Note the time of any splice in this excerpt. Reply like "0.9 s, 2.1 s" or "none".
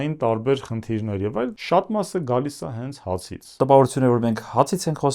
1.6 s, 3.5 s

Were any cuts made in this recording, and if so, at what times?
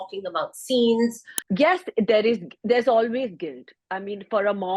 1.3 s

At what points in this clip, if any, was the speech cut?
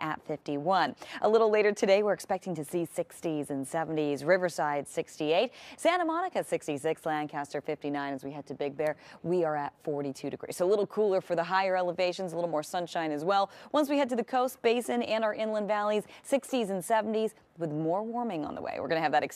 2.3 s

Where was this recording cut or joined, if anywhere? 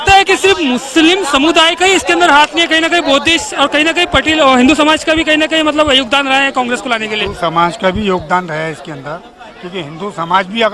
none

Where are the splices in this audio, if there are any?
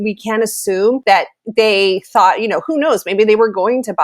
1.0 s

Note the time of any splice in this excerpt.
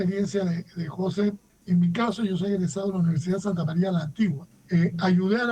1.5 s, 4.5 s

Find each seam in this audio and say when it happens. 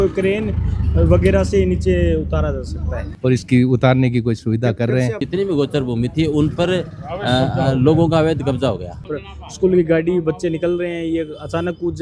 3.2 s, 5.2 s, 9.1 s

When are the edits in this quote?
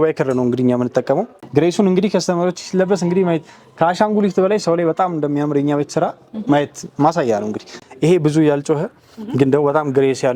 1.3 s, 7.7 s

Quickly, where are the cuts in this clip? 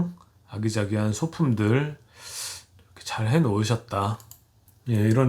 none

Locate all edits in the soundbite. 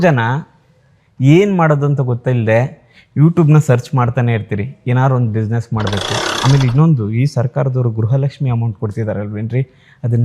6.3 s

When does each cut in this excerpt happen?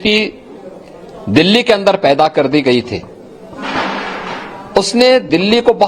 none

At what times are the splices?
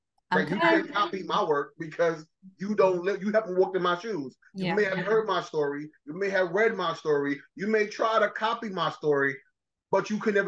none

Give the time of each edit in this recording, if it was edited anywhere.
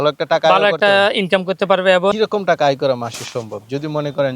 2.1 s

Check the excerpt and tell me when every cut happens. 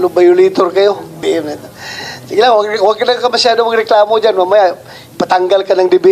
1.2 s

